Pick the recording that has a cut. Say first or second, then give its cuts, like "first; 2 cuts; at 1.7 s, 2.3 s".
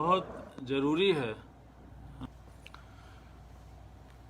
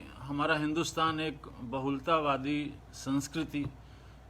first; 1 cut; at 1.9 s